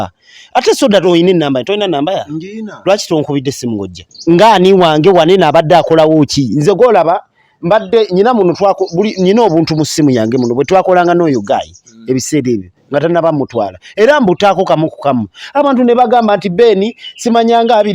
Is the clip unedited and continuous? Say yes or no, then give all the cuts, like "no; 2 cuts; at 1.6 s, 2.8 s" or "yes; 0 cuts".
no; 1 cut; at 4.1 s